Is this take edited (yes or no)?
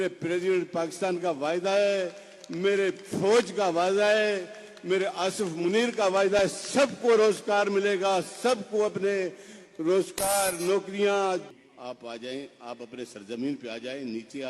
yes